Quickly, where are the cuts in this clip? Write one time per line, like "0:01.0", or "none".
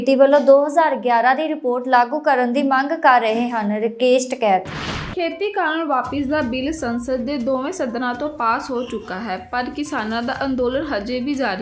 none